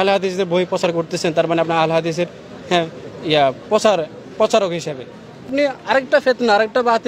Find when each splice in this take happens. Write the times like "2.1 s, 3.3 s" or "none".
5.5 s